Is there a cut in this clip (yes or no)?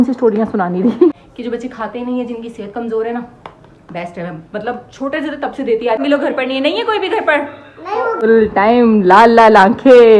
yes